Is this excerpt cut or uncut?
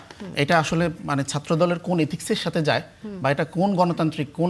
uncut